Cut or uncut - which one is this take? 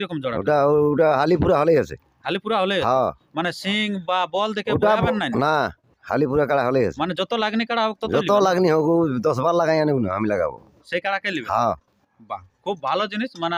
uncut